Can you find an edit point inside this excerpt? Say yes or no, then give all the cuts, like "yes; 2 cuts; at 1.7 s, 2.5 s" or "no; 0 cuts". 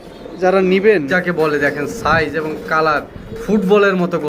yes; 1 cut; at 1.1 s